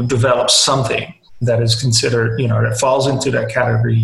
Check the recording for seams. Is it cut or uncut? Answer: cut